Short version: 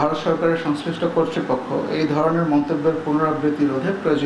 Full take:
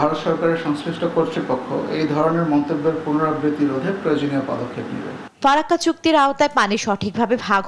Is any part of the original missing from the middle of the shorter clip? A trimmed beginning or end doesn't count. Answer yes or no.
no